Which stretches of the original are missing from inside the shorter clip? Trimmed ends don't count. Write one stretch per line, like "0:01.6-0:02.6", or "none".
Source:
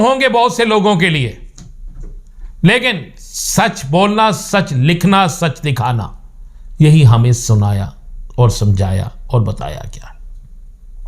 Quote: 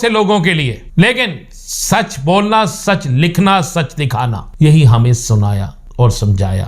0:01.4-0:02.5
0:06.1-0:06.6
0:08.0-0:08.2